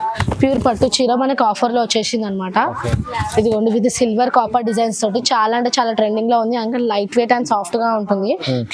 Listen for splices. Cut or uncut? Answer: uncut